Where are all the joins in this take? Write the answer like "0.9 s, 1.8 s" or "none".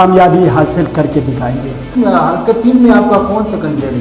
2.0 s